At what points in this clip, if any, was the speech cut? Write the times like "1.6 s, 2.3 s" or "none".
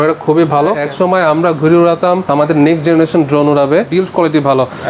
0.8 s, 3.9 s